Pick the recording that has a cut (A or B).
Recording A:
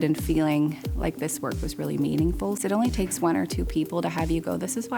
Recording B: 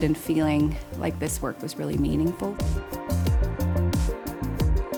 A